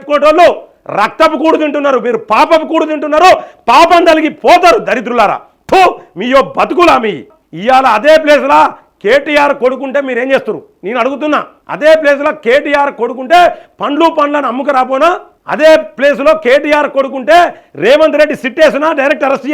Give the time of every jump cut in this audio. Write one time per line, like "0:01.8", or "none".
0:07.3